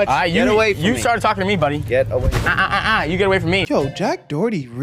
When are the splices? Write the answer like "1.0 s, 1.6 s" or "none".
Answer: 3.6 s